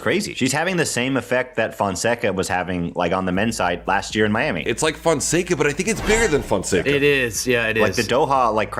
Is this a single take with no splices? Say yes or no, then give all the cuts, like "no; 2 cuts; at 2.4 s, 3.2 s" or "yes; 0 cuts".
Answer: yes; 0 cuts